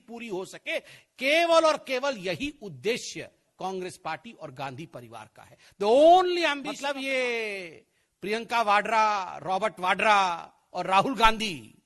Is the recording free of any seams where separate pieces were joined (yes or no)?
no